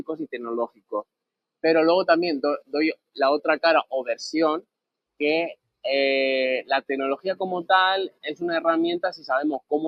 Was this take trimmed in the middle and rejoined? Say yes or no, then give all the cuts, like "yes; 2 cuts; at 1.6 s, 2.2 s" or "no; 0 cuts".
no; 0 cuts